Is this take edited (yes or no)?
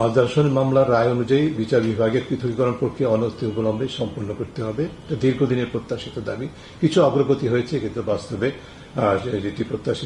no